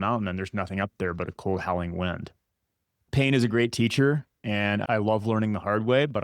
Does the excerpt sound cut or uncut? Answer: cut